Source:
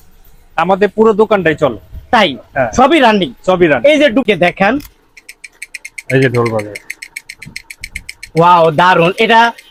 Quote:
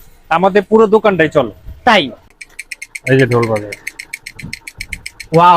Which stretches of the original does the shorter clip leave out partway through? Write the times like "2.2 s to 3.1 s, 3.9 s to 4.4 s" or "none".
2.4 s to 5.2 s